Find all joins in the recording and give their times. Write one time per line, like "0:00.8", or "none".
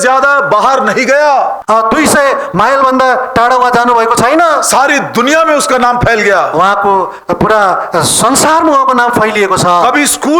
0:01.6